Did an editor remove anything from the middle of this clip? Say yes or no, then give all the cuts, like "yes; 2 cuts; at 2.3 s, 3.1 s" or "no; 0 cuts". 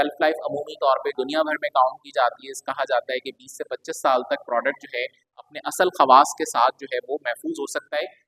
yes; 1 cut; at 1.1 s